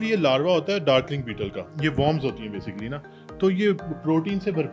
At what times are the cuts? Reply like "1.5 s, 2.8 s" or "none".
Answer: 1.7 s